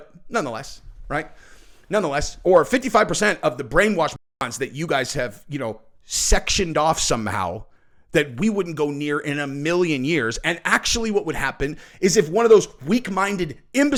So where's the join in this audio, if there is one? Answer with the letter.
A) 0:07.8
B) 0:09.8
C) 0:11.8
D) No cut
D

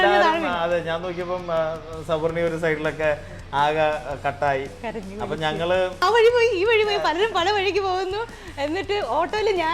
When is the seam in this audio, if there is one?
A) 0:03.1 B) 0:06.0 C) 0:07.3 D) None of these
B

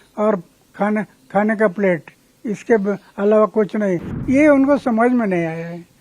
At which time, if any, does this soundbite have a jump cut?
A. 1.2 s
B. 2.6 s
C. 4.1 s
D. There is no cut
C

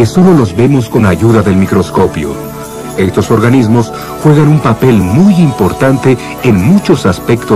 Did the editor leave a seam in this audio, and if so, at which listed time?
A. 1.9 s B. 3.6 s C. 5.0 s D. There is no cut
C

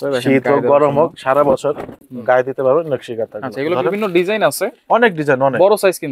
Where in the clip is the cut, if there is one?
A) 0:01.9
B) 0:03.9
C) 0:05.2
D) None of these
D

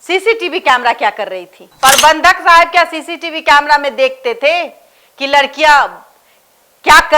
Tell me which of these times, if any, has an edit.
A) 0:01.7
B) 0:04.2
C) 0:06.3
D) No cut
A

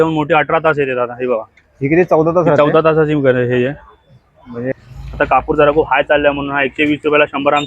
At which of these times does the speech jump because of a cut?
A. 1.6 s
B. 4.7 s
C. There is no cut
B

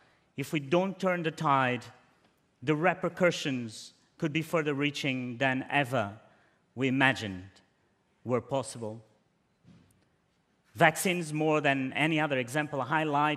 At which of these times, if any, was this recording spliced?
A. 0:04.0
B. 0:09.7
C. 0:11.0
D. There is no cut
A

